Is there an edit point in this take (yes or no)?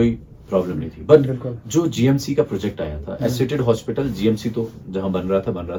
no